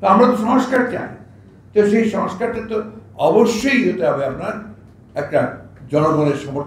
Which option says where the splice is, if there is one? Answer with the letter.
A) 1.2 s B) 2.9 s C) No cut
C